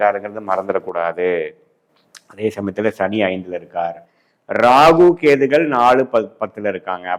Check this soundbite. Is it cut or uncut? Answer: uncut